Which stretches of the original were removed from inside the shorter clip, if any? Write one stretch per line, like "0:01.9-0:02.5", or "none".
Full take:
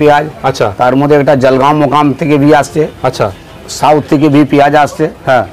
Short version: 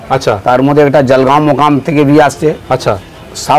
none